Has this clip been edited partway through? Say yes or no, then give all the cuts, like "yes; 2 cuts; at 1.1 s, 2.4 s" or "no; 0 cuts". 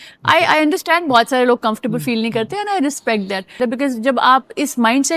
yes; 1 cut; at 3.6 s